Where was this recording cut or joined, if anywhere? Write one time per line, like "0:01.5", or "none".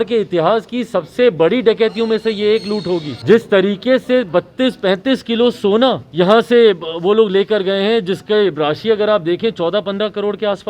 0:03.1
0:06.0

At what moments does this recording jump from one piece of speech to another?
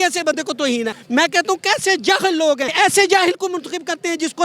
0:01.0
0:02.7

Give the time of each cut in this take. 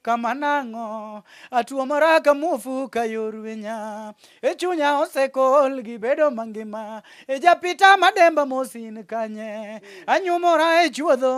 none

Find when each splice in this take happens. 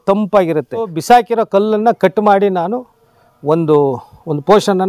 0:00.9

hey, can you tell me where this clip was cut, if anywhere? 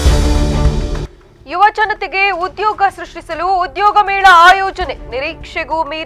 0:01.1

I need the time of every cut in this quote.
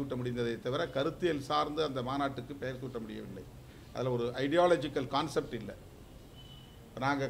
none

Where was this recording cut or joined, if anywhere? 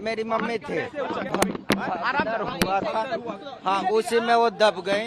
0:01.2

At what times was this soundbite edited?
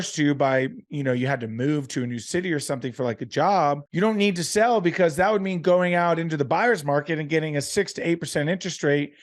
0:03.9

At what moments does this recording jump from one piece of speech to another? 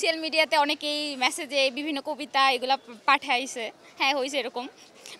none

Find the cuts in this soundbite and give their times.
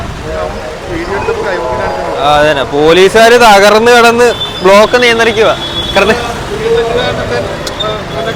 none

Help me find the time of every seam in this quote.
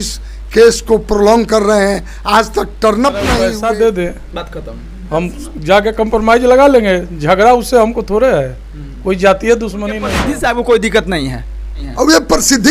0:03.4
0:10.1

